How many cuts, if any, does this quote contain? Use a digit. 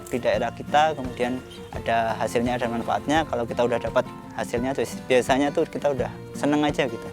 1